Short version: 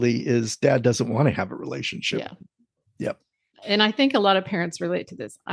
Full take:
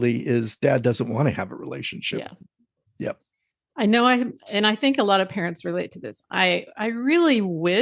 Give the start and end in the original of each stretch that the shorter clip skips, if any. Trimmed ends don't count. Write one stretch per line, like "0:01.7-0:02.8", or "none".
0:03.6-0:04.4